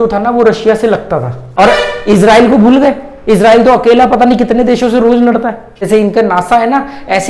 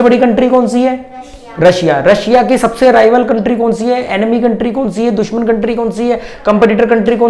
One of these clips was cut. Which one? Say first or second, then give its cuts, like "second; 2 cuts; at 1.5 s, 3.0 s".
first; 2 cuts; at 1.4 s, 5.9 s